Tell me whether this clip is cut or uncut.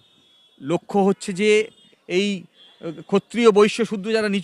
cut